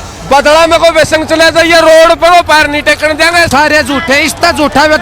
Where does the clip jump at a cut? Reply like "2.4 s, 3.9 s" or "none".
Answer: 3.5 s